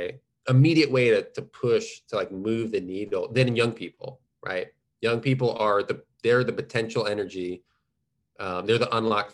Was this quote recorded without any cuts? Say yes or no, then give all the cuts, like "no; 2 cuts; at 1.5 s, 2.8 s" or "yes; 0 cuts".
yes; 0 cuts